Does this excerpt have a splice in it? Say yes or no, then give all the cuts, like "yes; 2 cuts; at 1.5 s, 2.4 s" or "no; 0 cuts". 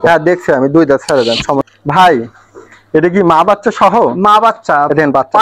yes; 1 cut; at 1.7 s